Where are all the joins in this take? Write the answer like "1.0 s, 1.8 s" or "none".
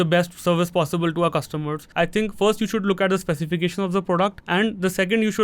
1.8 s, 4.4 s